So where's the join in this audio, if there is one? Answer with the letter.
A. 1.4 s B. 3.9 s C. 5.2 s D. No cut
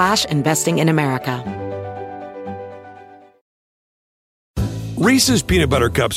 A